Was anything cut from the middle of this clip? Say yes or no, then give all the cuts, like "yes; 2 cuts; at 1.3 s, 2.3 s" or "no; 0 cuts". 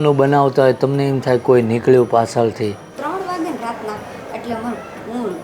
yes; 1 cut; at 2.9 s